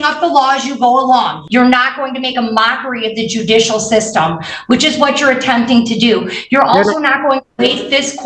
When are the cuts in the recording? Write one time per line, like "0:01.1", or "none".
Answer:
0:01.4